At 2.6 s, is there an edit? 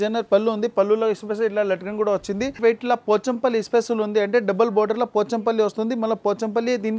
yes; 1 cut; at 2.6 s

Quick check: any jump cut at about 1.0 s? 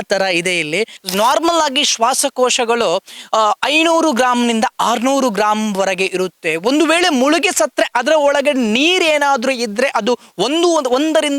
yes; 1 cut; at 1.0 s

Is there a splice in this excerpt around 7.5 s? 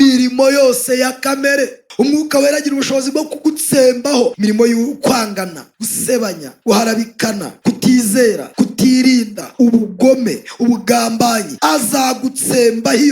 yes; 6 cuts; at 4.3 s, 6.2 s, 7.5 s, 8.4 s, 9.4 s, 11.5 s

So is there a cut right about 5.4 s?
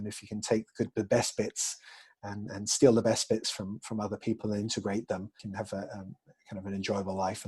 yes; 1 cut; at 5.4 s

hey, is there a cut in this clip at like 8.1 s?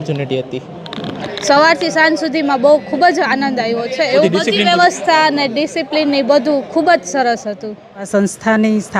yes; 3 cuts; at 1.3 s, 4.2 s, 8.1 s

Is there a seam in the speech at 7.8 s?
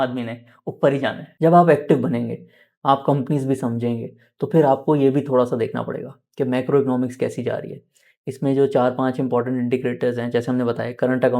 no; 1 cut; at 1.3 s

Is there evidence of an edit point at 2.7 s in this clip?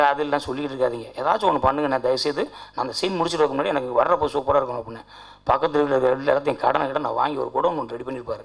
no; 0 cuts

